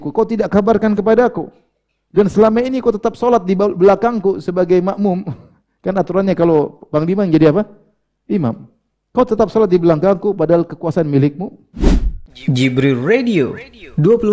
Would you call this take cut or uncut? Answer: cut